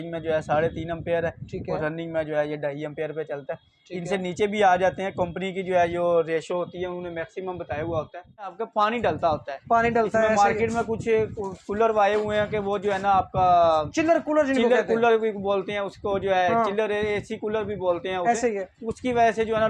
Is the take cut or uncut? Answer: cut